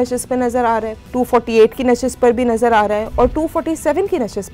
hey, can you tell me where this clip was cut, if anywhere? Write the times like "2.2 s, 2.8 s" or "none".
1.0 s